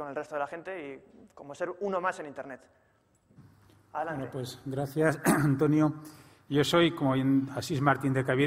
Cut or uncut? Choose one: uncut